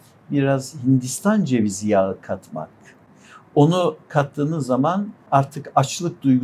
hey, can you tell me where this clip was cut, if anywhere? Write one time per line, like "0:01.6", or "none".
0:05.2